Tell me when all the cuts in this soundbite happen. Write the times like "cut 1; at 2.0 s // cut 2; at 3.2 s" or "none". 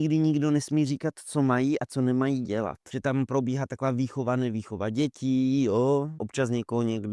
cut 1; at 2.8 s // cut 2; at 6.2 s